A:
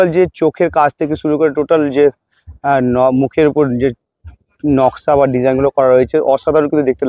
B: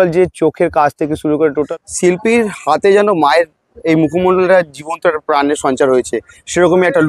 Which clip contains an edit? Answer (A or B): B